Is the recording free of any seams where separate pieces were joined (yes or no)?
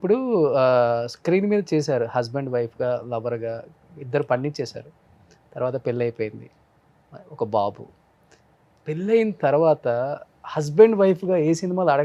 yes